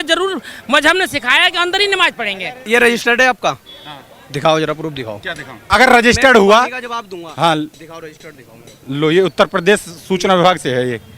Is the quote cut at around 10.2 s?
no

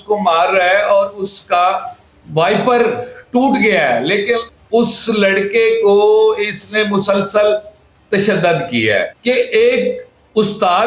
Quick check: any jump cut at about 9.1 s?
yes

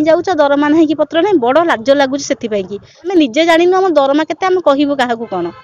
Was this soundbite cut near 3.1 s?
yes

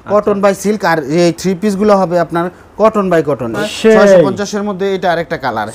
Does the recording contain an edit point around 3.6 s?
yes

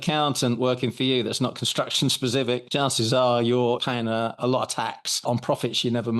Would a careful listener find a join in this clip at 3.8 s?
yes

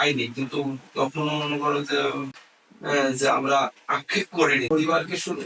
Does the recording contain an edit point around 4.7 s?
yes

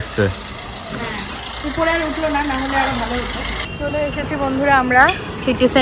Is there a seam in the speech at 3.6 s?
yes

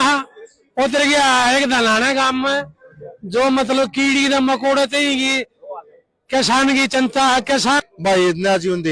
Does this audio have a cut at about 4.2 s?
no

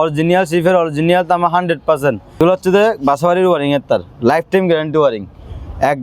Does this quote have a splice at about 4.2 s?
no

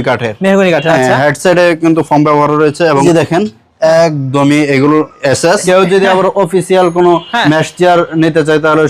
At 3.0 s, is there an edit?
yes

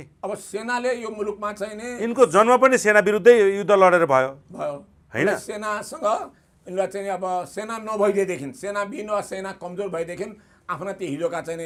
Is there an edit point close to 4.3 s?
no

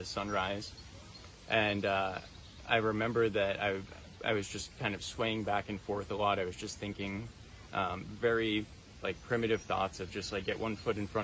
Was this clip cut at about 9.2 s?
no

